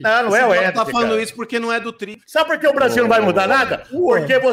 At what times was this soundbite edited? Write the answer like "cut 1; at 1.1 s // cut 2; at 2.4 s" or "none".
cut 1; at 2.1 s